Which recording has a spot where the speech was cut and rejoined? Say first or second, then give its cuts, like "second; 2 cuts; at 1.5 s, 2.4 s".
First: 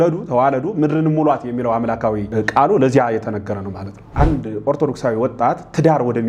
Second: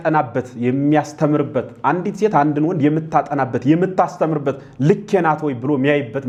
first; 2 cuts; at 2.3 s, 4.1 s